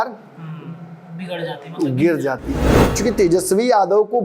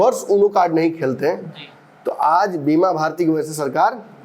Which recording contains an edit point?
first; 1 cut; at 2.8 s

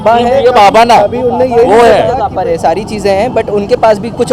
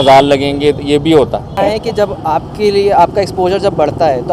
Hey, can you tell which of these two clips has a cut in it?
second; 1 cut; at 1.5 s

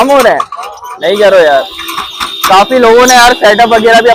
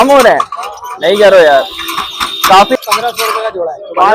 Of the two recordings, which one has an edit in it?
second; 1 cut; at 2.8 s

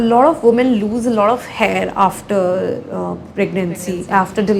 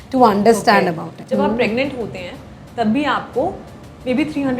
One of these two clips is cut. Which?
second; 1 cut; at 1.1 s

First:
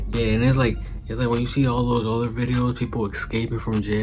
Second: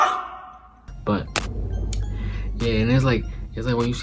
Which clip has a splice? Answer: second; 1 cut; at 1.1 s

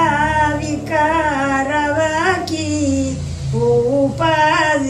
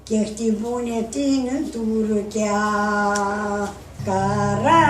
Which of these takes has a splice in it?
second; 1 cut; at 3.8 s

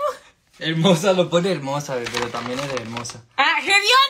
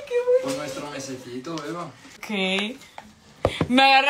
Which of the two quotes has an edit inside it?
second; 1 cut; at 2.2 s

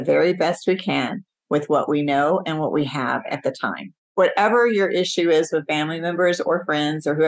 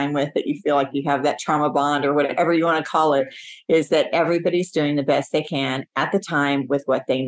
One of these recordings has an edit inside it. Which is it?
first; 1 cut; at 4.0 s

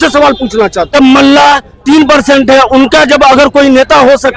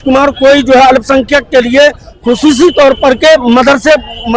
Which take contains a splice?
first; 1 cut; at 0.9 s

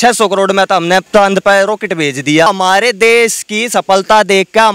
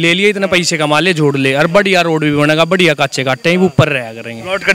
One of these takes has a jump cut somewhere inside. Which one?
first; 2 cuts; at 1.1 s, 2.5 s

